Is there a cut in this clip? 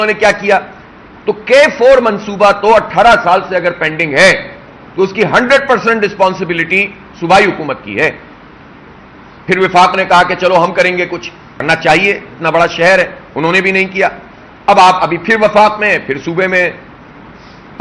yes; 1 cut; at 11.6 s

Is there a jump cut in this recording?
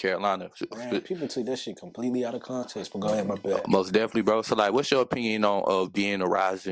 no; 0 cuts

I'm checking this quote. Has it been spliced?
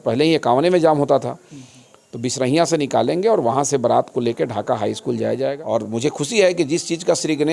yes; 1 cut; at 5.6 s

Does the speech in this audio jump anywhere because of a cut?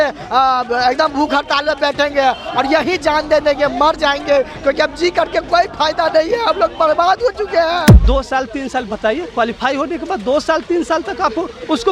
yes; 1 cut; at 8.0 s

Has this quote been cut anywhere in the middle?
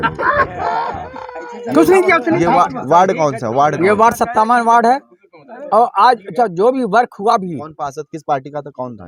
no; 0 cuts

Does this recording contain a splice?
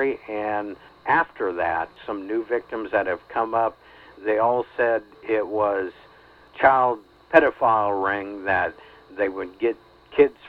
yes; 4 cuts; at 0.9 s, 1.9 s, 6.4 s, 7.1 s

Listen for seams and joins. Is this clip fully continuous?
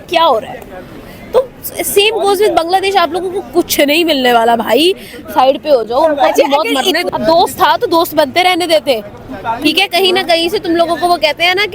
no; 1 cut; at 7.0 s

